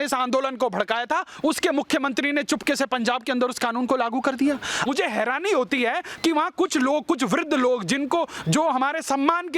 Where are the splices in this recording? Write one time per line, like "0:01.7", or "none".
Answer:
0:04.9